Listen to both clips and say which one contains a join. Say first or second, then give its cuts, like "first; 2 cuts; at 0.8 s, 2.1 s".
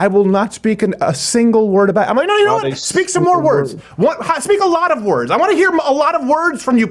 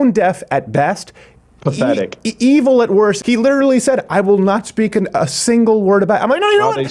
second; 1 cut; at 3.2 s